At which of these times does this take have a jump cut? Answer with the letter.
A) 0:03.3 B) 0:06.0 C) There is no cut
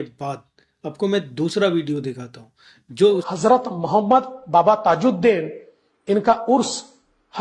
A